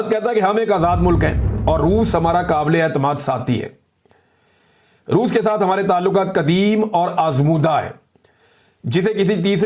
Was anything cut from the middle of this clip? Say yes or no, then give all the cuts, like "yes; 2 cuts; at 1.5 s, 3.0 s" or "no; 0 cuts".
no; 0 cuts